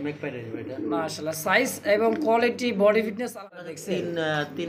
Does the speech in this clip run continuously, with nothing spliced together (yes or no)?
no